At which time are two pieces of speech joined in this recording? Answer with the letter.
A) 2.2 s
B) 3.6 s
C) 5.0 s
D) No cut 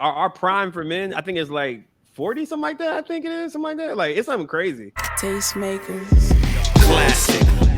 C